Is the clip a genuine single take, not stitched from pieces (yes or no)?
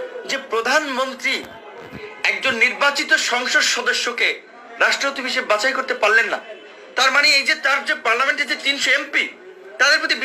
yes